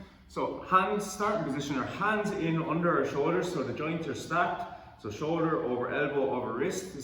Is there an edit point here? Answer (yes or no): no